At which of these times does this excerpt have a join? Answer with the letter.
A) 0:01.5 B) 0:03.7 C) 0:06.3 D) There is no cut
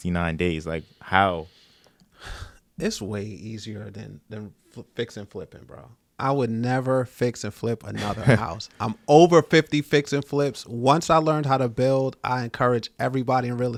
D